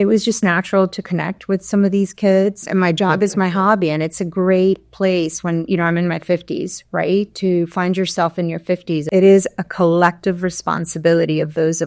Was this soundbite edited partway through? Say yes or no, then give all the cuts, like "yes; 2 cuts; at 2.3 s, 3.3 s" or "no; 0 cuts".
yes; 2 cuts; at 2.6 s, 9.1 s